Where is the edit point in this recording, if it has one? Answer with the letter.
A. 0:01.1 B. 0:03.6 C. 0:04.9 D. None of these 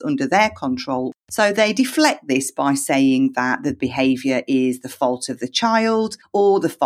A